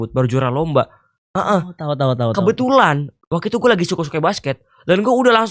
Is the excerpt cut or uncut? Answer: uncut